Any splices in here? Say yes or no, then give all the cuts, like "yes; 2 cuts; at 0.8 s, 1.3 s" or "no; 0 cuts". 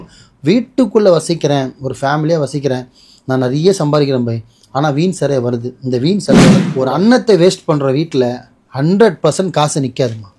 yes; 1 cut; at 6.7 s